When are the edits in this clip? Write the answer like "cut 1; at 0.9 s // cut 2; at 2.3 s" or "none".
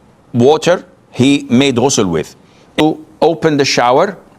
cut 1; at 2.8 s